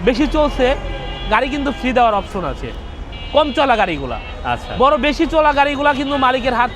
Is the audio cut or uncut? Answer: uncut